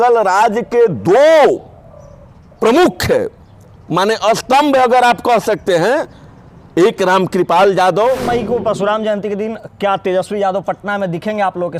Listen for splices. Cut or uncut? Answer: cut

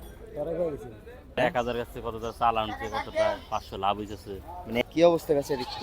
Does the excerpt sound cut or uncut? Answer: cut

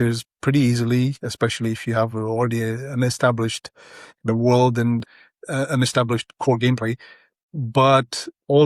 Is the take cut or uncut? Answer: cut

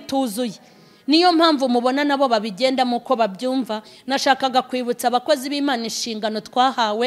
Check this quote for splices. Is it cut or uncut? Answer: uncut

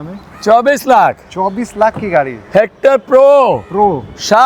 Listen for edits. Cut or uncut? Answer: uncut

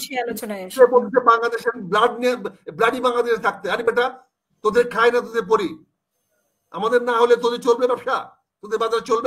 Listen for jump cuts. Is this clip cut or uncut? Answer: uncut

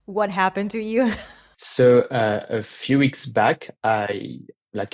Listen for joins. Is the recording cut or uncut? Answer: uncut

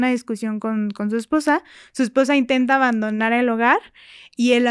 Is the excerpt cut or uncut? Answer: uncut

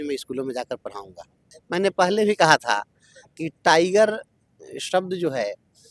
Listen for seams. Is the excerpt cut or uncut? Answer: cut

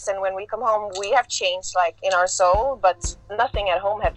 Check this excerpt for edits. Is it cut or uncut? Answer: uncut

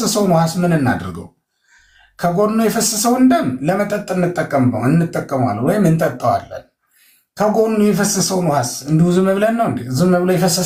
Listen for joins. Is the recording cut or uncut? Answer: uncut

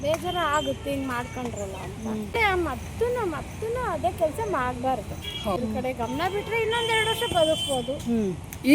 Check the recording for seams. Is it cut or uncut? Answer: cut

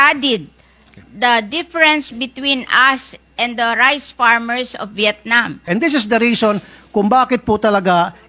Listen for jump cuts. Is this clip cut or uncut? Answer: cut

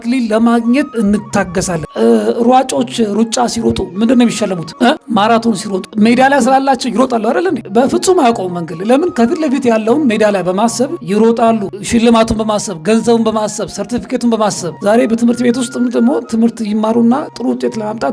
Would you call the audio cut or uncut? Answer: cut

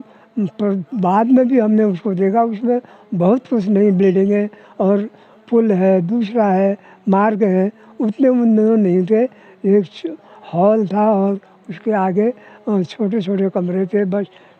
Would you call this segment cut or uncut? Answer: uncut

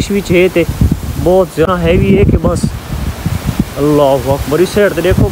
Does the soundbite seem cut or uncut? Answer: cut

